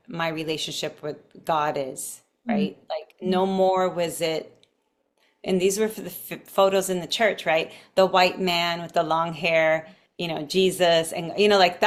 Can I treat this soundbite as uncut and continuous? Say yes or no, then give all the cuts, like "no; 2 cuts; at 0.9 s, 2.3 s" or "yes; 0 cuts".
yes; 0 cuts